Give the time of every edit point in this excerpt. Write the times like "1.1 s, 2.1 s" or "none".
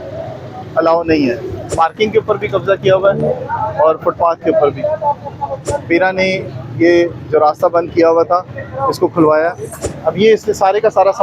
1.6 s, 5.6 s, 9.7 s